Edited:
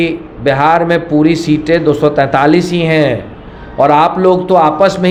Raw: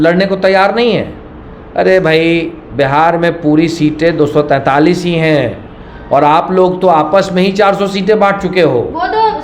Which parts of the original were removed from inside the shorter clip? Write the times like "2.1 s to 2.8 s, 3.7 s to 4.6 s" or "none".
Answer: none